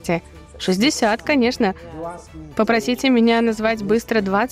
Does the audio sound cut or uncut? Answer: uncut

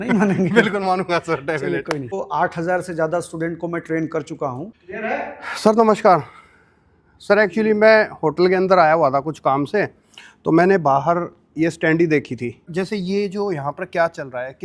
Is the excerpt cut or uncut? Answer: cut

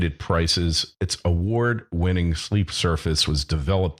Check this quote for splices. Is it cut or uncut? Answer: cut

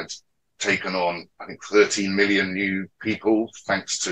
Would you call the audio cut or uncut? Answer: uncut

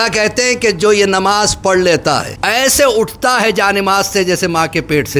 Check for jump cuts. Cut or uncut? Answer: cut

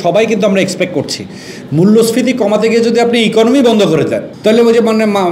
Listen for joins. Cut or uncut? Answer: cut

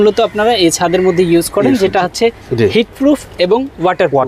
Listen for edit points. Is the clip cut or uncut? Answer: uncut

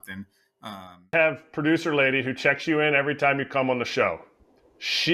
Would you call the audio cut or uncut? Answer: cut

